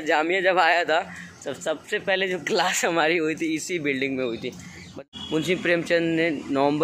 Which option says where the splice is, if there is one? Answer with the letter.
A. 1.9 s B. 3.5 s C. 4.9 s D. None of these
C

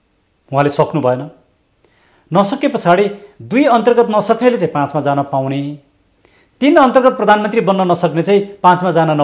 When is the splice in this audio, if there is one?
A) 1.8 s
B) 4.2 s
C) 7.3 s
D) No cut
D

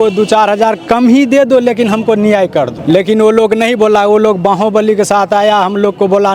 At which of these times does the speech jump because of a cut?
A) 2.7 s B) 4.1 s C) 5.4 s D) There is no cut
A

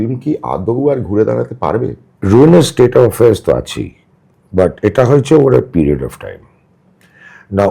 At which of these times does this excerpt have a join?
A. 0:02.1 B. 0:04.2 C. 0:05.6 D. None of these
A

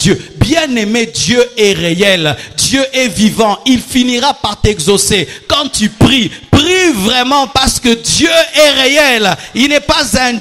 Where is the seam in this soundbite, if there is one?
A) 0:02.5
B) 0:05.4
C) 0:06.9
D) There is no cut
D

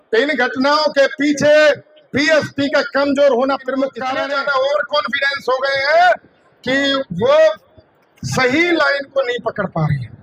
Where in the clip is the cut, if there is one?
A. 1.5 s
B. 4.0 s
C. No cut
B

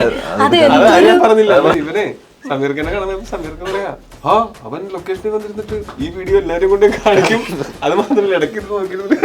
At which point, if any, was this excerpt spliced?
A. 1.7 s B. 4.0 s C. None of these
A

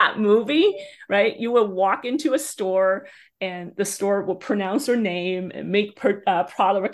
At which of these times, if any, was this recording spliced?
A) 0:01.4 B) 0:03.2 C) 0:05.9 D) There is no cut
D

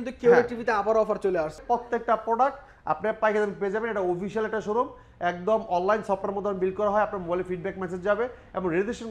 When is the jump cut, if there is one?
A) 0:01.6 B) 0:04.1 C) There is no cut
A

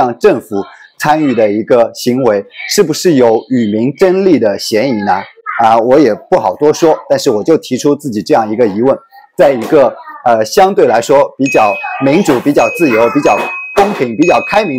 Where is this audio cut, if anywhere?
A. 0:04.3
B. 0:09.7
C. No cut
C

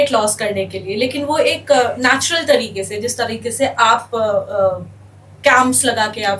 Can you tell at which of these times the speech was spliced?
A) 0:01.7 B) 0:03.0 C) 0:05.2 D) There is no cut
D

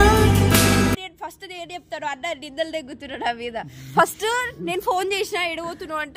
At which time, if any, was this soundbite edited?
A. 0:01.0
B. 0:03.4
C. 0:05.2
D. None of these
D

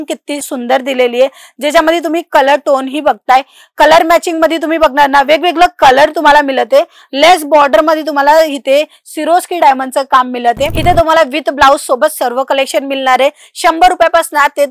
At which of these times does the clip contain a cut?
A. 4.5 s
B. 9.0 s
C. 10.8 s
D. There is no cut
C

